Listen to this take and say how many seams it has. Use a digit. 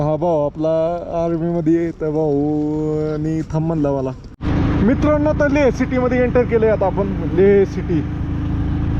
1